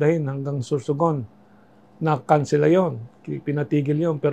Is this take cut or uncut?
uncut